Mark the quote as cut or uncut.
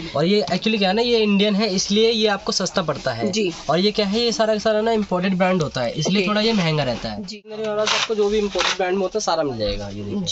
cut